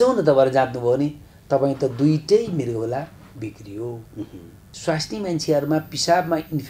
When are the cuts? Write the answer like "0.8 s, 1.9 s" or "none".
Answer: 4.7 s